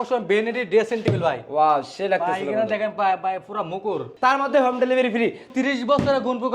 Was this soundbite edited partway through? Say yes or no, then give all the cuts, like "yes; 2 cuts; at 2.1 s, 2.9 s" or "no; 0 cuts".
yes; 2 cuts; at 4.1 s, 5.5 s